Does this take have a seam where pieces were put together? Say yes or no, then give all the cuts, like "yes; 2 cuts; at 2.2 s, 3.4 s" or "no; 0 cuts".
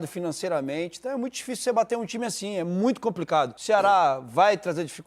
yes; 1 cut; at 3.6 s